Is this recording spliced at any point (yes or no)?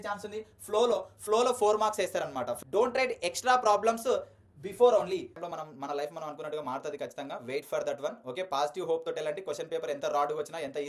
yes